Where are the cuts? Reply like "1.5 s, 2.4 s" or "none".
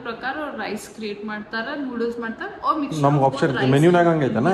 none